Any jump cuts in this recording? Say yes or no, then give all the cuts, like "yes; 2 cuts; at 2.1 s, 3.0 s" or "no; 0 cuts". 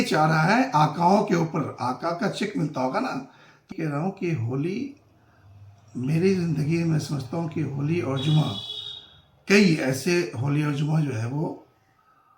yes; 1 cut; at 3.7 s